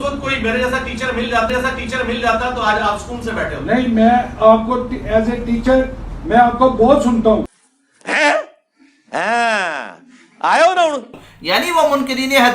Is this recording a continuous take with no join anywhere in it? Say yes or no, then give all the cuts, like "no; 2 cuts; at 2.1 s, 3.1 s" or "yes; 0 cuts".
no; 4 cuts; at 1.5 s, 3.8 s, 7.2 s, 11.1 s